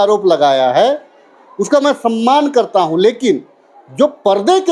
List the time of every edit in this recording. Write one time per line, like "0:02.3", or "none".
none